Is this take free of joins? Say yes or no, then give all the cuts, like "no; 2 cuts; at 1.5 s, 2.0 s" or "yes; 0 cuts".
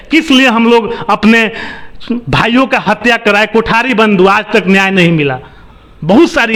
yes; 0 cuts